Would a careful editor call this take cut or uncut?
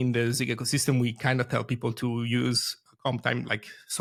uncut